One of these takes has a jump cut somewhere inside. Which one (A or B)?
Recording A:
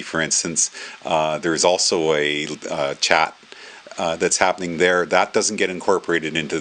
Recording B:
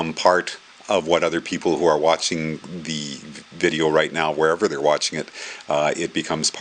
B